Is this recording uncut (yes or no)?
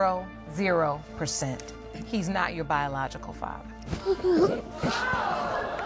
yes